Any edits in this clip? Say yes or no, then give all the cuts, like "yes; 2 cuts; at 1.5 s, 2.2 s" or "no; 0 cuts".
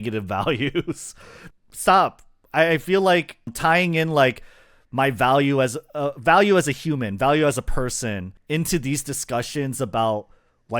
yes; 1 cut; at 1.4 s